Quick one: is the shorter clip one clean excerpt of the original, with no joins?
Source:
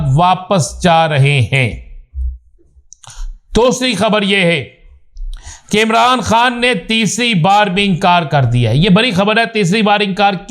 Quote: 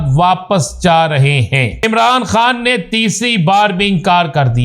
no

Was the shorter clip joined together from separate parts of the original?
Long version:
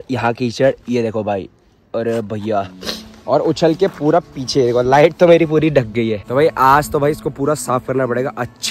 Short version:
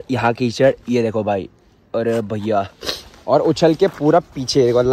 no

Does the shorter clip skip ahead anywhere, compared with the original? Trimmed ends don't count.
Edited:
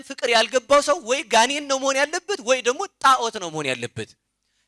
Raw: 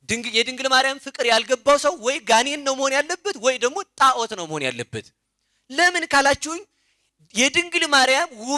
no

